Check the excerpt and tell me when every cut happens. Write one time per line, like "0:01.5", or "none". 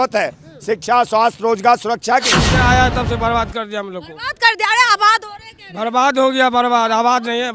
0:02.4